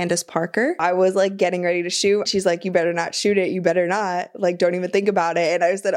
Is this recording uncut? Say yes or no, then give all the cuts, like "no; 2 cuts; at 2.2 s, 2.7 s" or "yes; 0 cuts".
no; 2 cuts; at 0.8 s, 2.3 s